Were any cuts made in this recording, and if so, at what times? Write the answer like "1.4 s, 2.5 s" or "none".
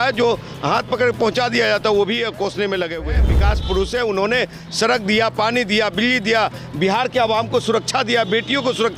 3.3 s